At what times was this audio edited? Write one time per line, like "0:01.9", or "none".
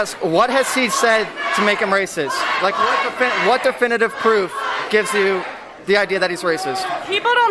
none